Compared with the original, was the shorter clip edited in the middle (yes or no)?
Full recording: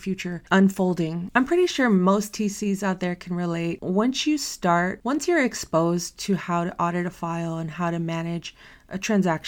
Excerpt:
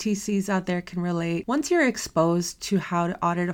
yes